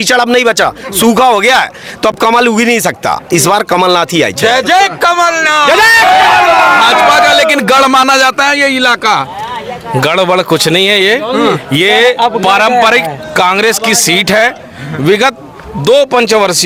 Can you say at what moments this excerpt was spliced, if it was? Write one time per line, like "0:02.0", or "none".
none